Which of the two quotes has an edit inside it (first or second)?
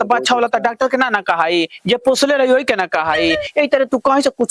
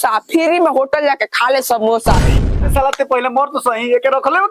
second